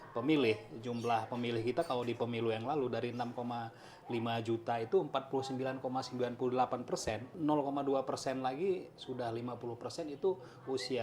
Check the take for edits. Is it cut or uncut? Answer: cut